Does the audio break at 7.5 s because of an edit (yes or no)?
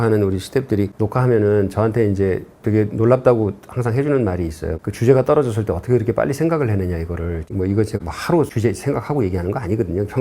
yes